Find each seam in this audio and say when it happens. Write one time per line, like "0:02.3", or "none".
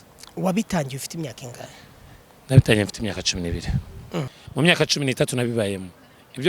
0:04.4